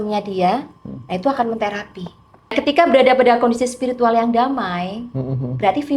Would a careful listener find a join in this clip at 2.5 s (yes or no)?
yes